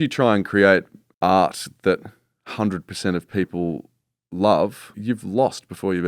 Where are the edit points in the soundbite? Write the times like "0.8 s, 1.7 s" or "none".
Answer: 1.0 s, 4.9 s

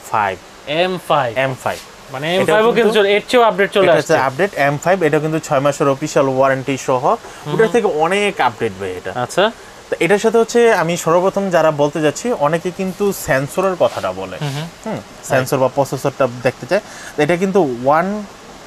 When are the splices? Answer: none

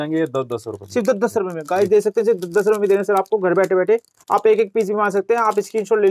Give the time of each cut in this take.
none

